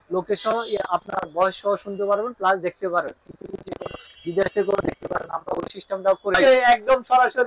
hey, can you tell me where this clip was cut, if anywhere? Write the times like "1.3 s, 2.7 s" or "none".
6.3 s